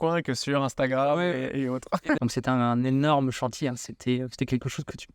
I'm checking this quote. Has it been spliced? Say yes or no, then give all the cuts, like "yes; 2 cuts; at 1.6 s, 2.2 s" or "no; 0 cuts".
yes; 1 cut; at 2.2 s